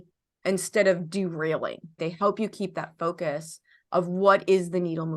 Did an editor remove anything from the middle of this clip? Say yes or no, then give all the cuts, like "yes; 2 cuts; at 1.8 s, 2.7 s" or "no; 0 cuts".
yes; 1 cut; at 2.0 s